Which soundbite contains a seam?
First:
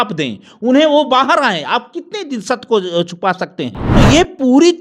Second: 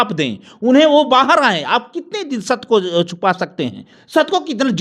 first; 1 cut; at 3.8 s

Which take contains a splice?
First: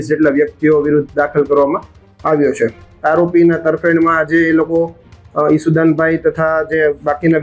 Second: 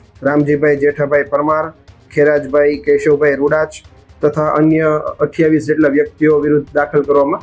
first; 1 cut; at 2.9 s

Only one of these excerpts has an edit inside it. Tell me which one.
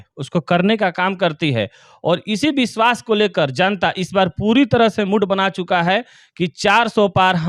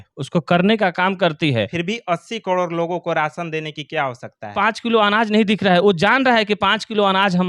second; 2 cuts; at 1.7 s, 4.5 s

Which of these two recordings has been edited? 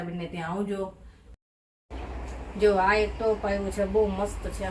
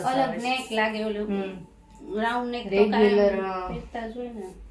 first; 1 cut; at 1.4 s

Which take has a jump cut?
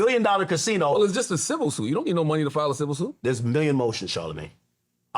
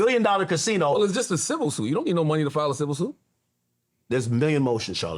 first; 1 cut; at 3.1 s

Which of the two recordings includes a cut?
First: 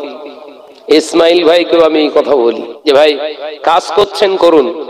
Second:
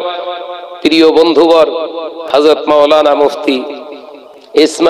first; 1 cut; at 2.7 s

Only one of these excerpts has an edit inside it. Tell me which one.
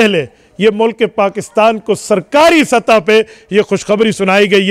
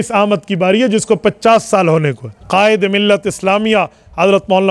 second; 1 cut; at 2.3 s

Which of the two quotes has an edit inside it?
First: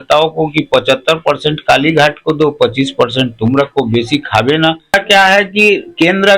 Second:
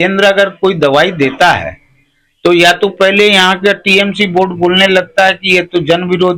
first; 1 cut; at 4.9 s

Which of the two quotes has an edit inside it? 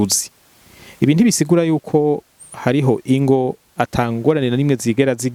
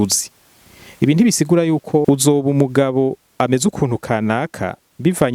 second; 1 cut; at 2.0 s

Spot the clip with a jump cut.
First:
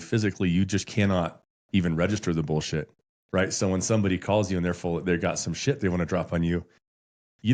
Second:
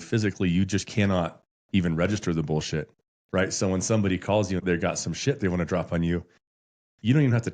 second; 1 cut; at 4.6 s

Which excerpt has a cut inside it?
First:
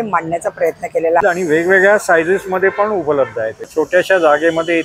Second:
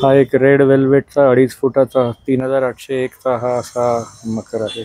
first; 2 cuts; at 1.2 s, 3.7 s

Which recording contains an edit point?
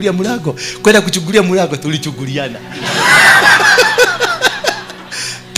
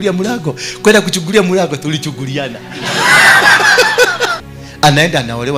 second; 1 cut; at 4.4 s

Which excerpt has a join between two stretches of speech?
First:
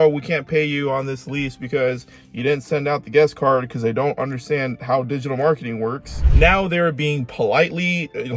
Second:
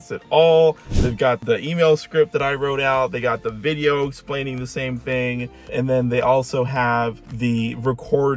second; 1 cut; at 1.4 s

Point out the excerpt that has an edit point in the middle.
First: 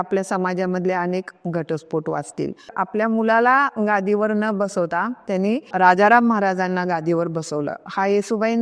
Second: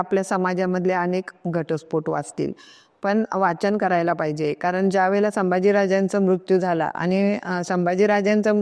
first; 2 cuts; at 2.7 s, 5.7 s

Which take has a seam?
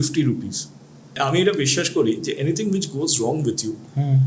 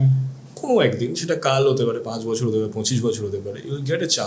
first; 1 cut; at 1.2 s

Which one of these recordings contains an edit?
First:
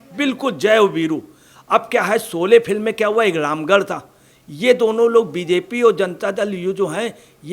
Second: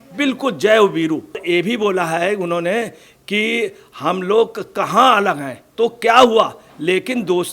second; 2 cuts; at 1.4 s, 5.6 s

